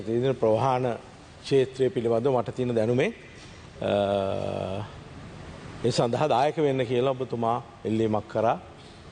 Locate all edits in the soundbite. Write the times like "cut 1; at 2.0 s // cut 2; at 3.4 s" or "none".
none